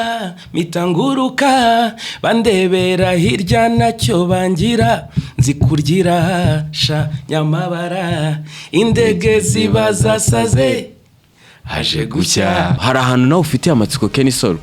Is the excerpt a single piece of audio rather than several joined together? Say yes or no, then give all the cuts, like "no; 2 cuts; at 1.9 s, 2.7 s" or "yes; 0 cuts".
no; 1 cut; at 12.8 s